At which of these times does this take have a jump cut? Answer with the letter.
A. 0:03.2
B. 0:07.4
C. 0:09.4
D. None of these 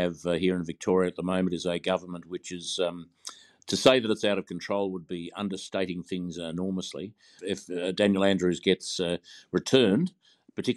B